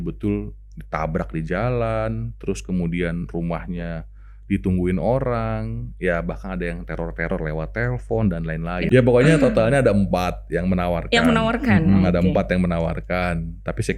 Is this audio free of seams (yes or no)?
no